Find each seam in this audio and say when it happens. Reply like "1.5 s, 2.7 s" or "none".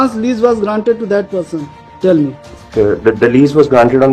2.6 s